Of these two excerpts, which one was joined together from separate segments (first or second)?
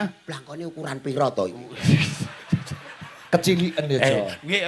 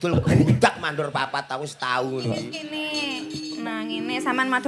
second